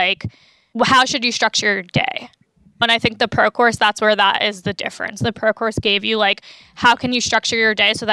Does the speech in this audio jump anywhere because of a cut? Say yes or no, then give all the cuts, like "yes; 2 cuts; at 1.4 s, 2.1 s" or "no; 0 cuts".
no; 0 cuts